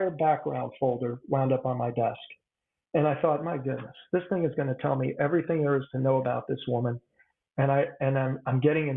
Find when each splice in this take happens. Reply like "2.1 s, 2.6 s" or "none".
none